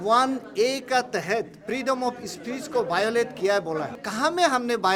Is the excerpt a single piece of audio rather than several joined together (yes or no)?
no